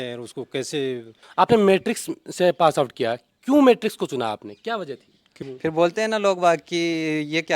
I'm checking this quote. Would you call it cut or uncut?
cut